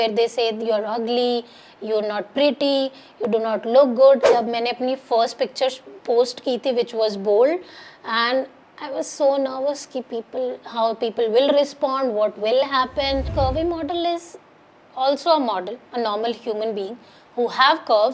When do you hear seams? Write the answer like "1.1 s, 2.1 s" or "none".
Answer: 4.2 s, 13.3 s